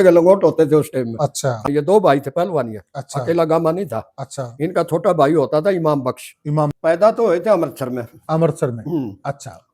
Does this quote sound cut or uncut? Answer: cut